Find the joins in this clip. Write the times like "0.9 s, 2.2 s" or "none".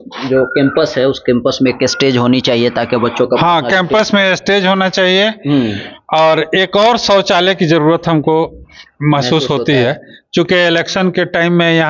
none